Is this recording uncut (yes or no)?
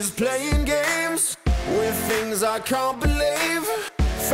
yes